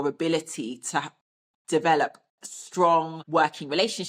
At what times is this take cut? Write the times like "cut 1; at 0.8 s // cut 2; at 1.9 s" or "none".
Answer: cut 1; at 3.2 s